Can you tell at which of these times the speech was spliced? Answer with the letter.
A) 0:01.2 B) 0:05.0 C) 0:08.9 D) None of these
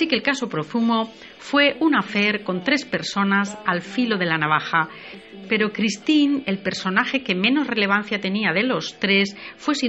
D